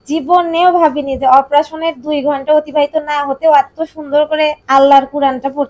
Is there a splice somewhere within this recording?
yes; 1 cut; at 4.6 s

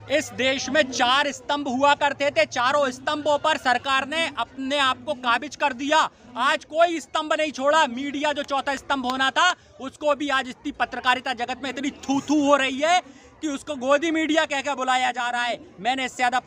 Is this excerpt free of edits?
yes; 0 cuts

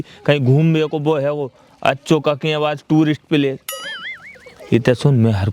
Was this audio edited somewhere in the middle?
no; 0 cuts

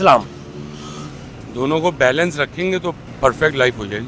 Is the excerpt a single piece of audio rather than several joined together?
yes; 0 cuts

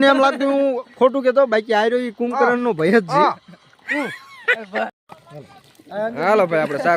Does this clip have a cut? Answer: yes; 1 cut; at 4.9 s

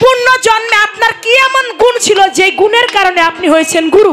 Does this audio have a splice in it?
no; 0 cuts

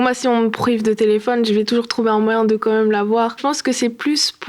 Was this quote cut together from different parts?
yes; 1 cut; at 3.3 s

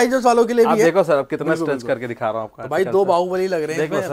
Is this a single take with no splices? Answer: yes; 0 cuts

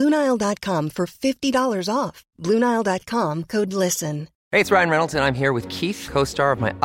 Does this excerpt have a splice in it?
yes; 1 cut; at 4.3 s

